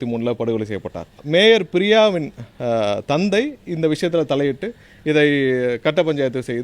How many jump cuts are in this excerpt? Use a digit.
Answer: 1